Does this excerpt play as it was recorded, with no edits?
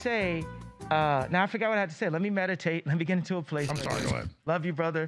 yes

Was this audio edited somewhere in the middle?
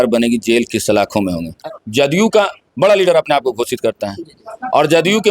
yes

